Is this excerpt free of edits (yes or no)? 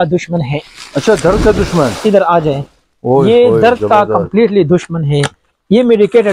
yes